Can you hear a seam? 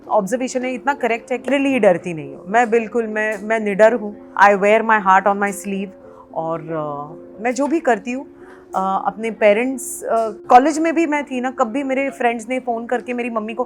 yes; 3 cuts; at 1.5 s, 4.2 s, 10.4 s

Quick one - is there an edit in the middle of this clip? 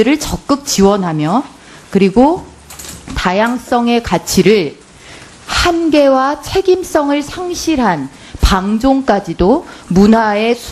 yes; 1 cut; at 1.5 s

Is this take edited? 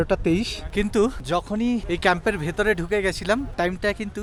no; 0 cuts

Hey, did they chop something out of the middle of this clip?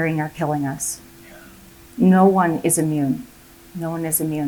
no; 0 cuts

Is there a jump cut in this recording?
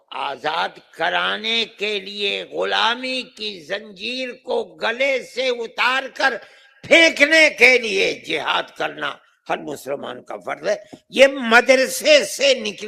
no; 0 cuts

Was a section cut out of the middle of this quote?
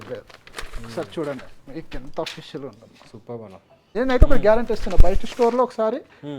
yes; 1 cut; at 3.9 s

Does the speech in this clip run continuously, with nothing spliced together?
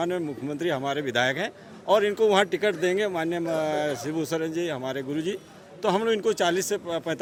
yes; 0 cuts

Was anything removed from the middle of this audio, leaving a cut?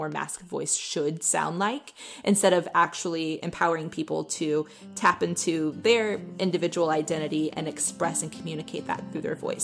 no; 0 cuts

